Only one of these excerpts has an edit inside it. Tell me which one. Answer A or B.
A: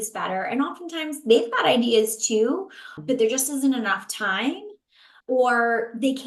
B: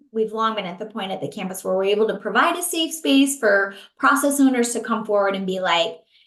A